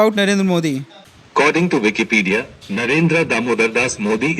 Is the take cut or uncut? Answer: cut